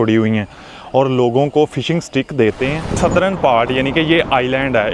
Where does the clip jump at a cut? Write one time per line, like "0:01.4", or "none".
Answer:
0:02.8